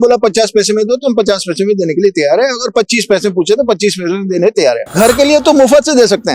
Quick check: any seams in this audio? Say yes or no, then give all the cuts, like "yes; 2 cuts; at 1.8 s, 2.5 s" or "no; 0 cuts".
yes; 1 cut; at 4.9 s